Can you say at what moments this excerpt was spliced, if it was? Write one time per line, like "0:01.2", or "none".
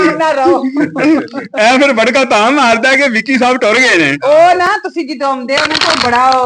none